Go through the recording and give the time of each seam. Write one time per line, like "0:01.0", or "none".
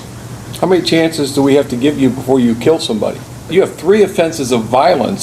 0:03.5